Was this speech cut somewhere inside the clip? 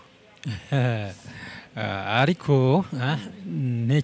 no; 0 cuts

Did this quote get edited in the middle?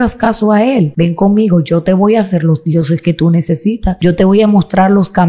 yes; 2 cuts; at 0.9 s, 4.0 s

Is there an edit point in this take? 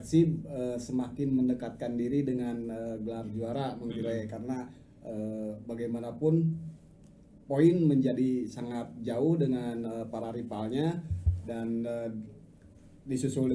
no; 0 cuts

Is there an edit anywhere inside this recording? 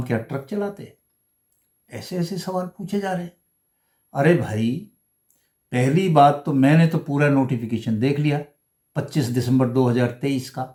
no; 0 cuts

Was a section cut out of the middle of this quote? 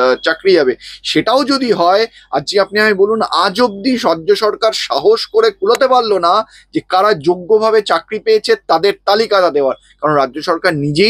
no; 0 cuts

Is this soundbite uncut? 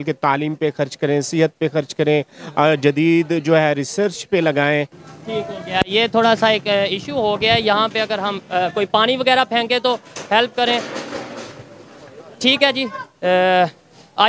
no; 1 cut; at 5.0 s

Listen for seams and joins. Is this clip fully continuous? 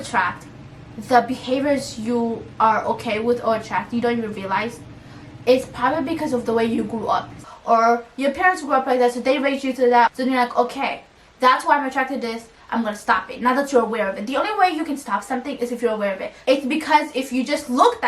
yes; 0 cuts

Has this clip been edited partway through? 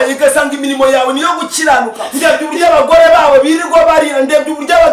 yes; 1 cut; at 2.0 s

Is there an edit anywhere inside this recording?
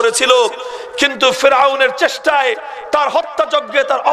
no; 0 cuts

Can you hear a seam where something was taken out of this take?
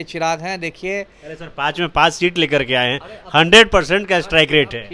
no; 0 cuts

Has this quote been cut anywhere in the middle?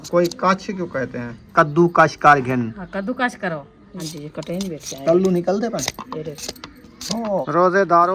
yes; 3 cuts; at 1.5 s, 3.9 s, 7.4 s

